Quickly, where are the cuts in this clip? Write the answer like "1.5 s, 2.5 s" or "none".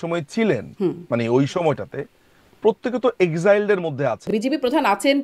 4.3 s